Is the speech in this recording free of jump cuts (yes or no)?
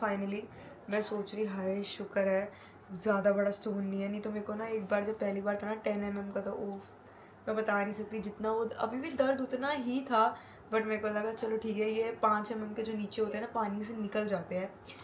yes